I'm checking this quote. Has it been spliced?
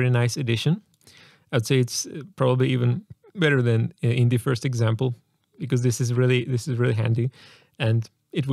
no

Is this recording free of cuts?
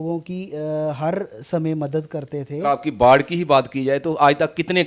no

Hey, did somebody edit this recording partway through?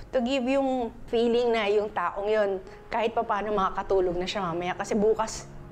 yes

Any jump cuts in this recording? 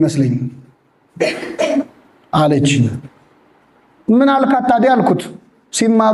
no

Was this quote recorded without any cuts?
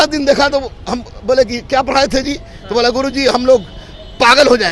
yes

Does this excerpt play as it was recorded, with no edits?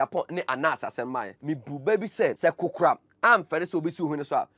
no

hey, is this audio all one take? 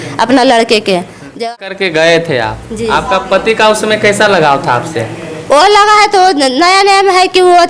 no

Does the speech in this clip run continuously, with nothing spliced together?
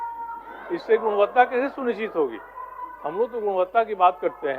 yes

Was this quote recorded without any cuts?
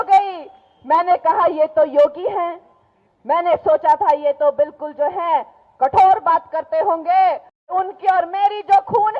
no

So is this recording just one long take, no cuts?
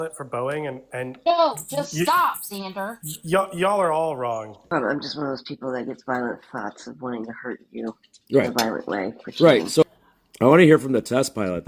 no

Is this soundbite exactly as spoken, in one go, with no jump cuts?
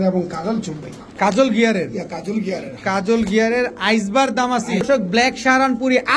no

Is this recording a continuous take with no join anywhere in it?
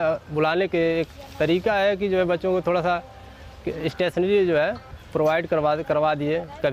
yes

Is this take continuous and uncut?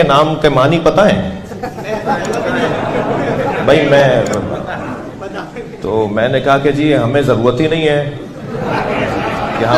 yes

